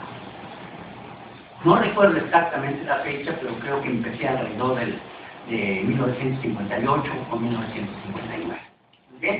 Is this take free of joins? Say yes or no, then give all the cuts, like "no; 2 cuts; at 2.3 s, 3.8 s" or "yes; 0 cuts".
no; 1 cut; at 4.8 s